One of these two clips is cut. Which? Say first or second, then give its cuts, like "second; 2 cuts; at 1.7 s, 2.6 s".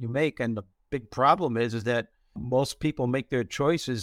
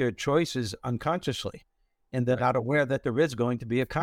first; 1 cut; at 2.4 s